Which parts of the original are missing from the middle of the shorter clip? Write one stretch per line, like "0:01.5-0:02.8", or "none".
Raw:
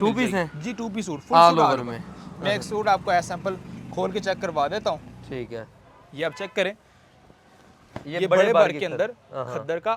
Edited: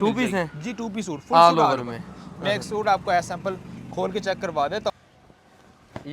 0:04.9-0:06.9